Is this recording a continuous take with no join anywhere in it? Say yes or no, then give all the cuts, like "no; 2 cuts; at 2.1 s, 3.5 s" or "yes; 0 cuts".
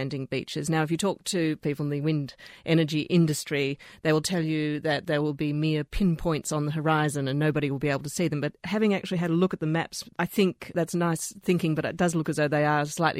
no; 2 cuts; at 1.6 s, 10.1 s